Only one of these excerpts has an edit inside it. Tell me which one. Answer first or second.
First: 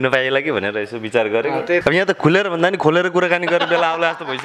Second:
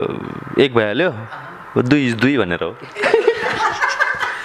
first